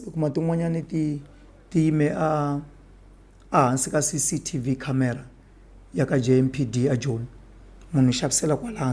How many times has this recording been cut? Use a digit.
0